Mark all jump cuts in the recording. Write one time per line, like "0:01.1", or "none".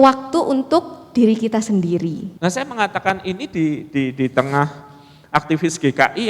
0:02.3